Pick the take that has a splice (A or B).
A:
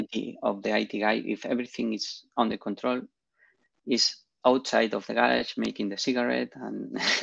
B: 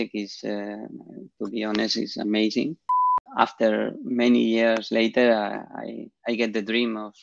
B